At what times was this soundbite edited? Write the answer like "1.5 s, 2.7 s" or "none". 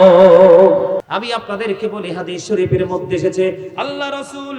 1.0 s